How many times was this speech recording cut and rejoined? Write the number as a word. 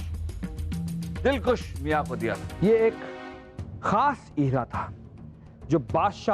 one